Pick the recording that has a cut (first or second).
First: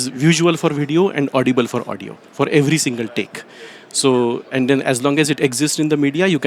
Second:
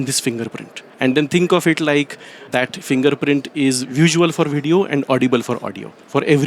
second